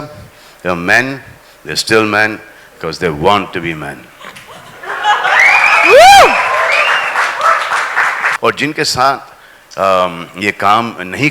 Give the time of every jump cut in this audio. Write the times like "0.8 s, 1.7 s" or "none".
8.3 s